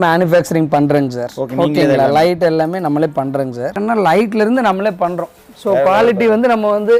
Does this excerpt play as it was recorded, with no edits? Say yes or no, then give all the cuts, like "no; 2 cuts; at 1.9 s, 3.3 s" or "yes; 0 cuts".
no; 1 cut; at 3.8 s